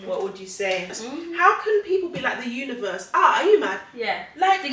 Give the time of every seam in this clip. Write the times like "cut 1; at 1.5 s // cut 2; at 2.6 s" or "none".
cut 1; at 1.0 s